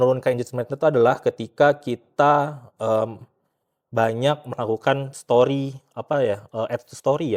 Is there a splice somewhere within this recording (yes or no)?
no